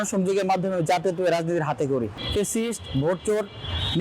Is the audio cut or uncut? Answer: cut